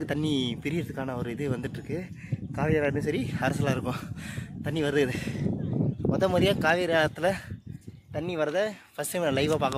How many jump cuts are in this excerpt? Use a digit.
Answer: 0